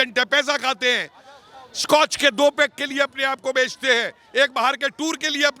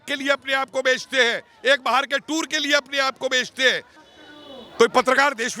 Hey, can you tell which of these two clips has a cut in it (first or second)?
second